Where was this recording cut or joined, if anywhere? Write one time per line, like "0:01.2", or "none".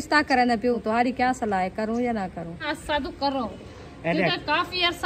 0:00.8
0:02.7